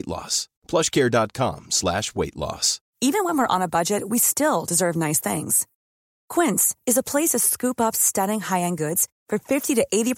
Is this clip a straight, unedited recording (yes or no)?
no